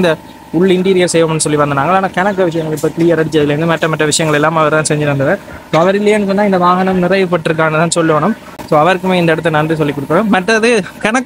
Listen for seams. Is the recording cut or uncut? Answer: uncut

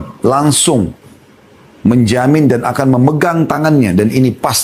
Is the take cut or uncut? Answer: uncut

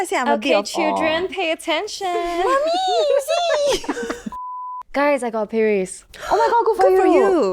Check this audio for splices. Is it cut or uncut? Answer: cut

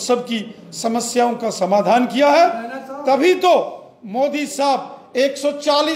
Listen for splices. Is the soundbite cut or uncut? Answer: uncut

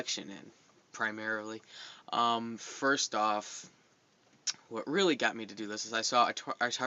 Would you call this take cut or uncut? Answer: cut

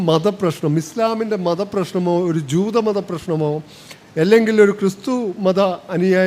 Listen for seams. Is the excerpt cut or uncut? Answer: uncut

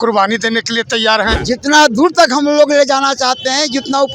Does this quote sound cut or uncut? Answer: cut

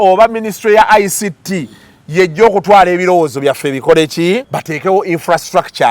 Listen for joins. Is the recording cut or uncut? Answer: cut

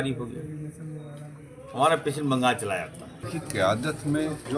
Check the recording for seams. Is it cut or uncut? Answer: cut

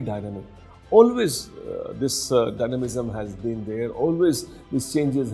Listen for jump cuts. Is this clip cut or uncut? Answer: uncut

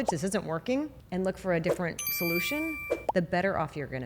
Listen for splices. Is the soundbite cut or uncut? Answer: cut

